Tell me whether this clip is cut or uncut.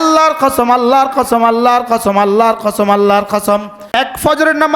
cut